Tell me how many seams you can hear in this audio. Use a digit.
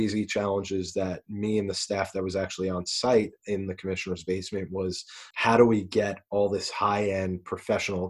1